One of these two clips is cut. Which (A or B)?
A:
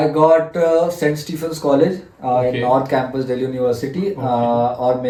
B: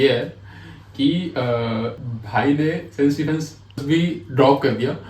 B